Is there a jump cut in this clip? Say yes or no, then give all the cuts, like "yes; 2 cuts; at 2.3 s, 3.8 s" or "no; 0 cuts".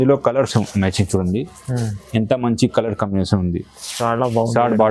no; 0 cuts